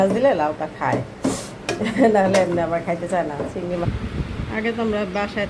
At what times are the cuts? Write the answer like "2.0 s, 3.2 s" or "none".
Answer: 3.8 s